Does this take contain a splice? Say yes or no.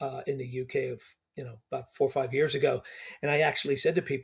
no